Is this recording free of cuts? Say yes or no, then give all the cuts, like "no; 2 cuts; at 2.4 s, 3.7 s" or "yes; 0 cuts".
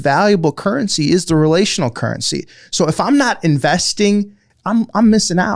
no; 1 cut; at 4.4 s